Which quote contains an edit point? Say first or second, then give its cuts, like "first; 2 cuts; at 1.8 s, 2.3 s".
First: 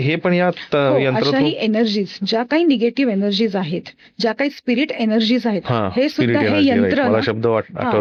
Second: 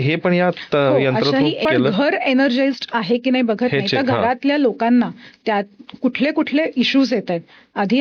second; 1 cut; at 1.6 s